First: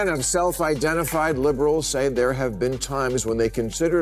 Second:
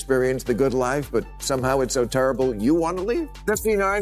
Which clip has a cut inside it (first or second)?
second